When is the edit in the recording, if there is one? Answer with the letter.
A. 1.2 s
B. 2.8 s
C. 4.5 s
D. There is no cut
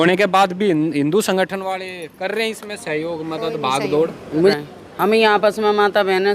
C